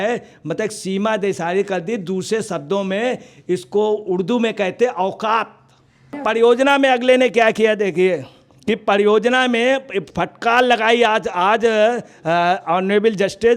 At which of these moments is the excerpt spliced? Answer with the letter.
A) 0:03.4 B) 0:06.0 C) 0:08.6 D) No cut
B